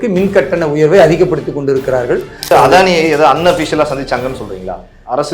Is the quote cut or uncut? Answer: cut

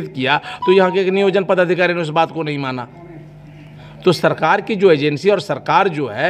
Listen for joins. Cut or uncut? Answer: uncut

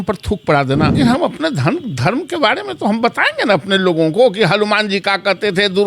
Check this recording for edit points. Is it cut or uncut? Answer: cut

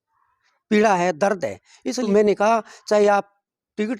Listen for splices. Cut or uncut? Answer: cut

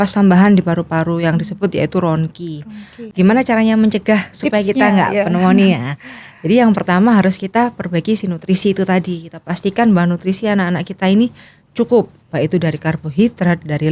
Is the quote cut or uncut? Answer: cut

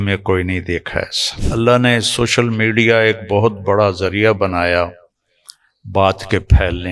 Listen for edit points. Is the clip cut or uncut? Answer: cut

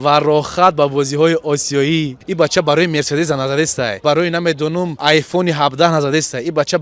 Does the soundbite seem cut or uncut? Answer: cut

